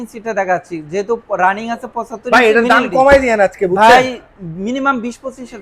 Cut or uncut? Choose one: uncut